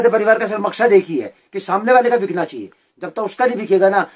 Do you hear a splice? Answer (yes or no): no